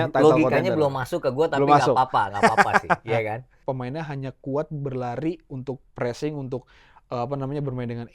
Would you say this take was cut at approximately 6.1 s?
no; 1 cut; at 3.7 s

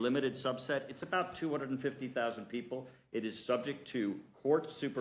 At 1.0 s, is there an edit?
no; 1 cut; at 3.3 s

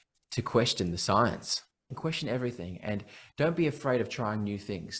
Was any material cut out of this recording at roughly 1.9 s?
yes; 1 cut; at 1.9 s

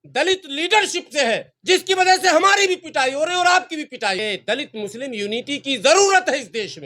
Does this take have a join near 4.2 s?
yes; 1 cut; at 4.2 s

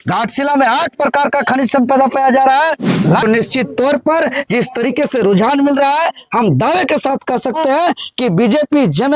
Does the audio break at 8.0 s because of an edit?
no; 1 cut; at 3.2 s

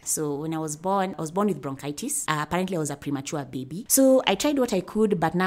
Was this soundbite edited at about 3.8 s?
yes; 3 cuts; at 1.1 s, 2.1 s, 3.8 s

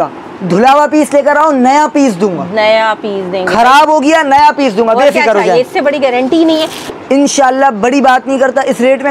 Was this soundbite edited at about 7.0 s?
yes; 1 cut; at 7.0 s

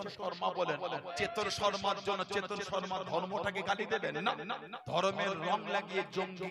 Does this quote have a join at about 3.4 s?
no; 2 cuts; at 1.1 s, 4.7 s

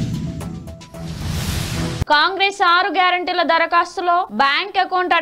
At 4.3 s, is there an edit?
no; 1 cut; at 2.0 s

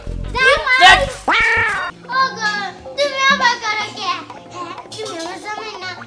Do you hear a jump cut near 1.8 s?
yes; 1 cut; at 1.8 s

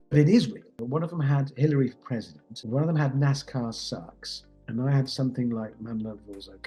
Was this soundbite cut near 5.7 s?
no; 3 cuts; at 0.8 s, 2.5 s, 4.5 s

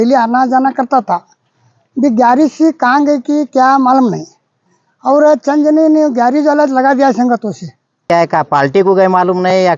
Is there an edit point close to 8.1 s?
yes; 1 cut; at 8.1 s

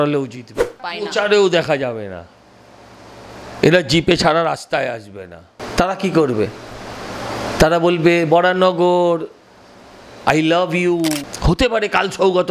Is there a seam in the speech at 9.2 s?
no; 3 cuts; at 0.9 s, 5.6 s, 11.3 s

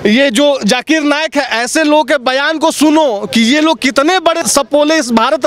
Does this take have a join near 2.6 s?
no; 1 cut; at 4.4 s

